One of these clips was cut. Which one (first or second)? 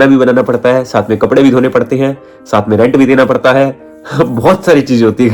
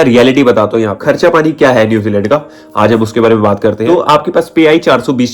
second